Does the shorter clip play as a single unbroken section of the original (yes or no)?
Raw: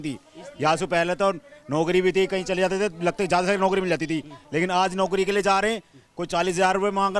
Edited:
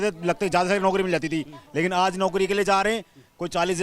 yes